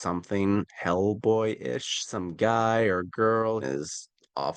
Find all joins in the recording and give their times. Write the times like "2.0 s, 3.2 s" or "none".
2.0 s, 3.6 s